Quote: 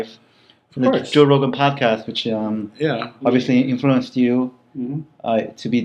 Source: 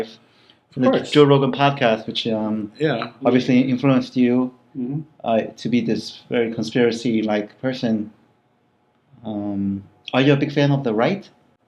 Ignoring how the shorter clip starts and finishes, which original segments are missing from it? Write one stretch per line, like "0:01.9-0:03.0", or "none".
none

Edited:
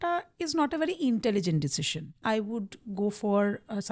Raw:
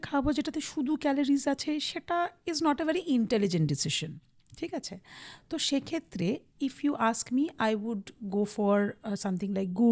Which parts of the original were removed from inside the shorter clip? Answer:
0:04.3-0:07.5

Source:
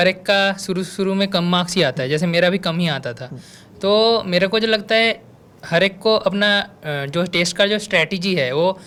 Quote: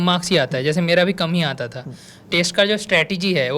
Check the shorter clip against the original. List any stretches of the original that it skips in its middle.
0:03.7-0:07.3

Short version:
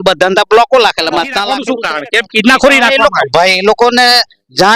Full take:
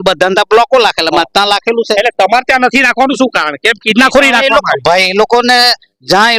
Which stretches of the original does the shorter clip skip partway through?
0:01.6-0:03.1

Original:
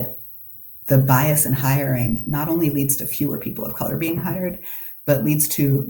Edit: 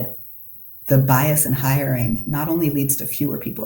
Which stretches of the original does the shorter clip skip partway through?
none

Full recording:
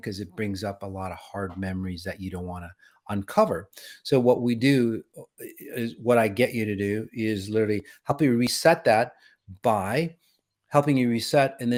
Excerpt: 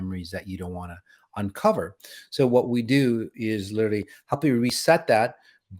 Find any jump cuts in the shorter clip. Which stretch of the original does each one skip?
0:05.1-0:07.1

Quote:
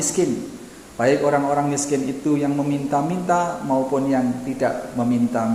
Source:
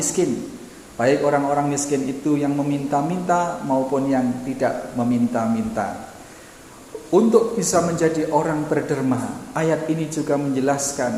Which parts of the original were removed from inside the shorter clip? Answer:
none

